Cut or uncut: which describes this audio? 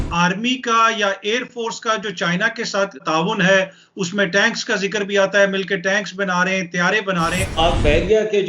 cut